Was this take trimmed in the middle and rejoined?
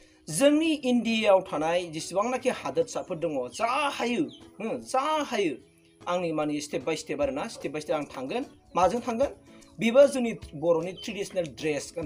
no; 0 cuts

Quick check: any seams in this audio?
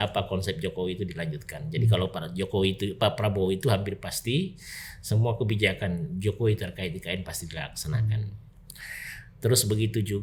no; 0 cuts

